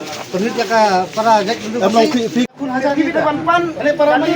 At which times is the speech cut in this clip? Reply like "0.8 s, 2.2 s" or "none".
2.5 s